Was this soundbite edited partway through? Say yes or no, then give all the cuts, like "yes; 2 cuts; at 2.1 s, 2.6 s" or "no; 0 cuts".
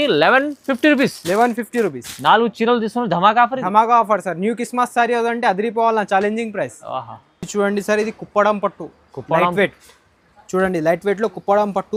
no; 0 cuts